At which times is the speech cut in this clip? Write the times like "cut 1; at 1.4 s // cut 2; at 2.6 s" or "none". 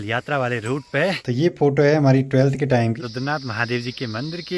cut 1; at 1.2 s // cut 2; at 3.0 s